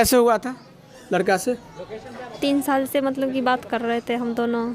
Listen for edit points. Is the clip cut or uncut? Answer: uncut